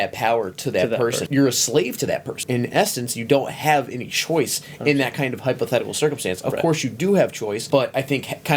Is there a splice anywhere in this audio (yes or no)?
yes